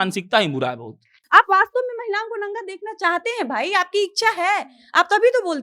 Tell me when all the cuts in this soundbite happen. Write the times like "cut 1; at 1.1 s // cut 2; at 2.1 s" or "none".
cut 1; at 1.1 s